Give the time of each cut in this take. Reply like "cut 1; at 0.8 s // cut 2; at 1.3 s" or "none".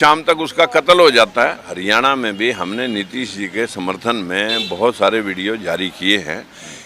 cut 1; at 1.8 s